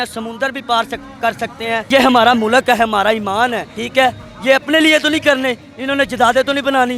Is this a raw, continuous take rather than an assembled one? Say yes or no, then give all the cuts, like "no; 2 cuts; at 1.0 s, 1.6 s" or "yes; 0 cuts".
yes; 0 cuts